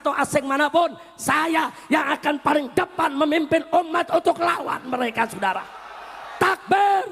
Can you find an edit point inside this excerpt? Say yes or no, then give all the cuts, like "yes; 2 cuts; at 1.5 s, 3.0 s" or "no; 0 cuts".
no; 0 cuts